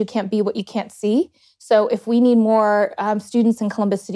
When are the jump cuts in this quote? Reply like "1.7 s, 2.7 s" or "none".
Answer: none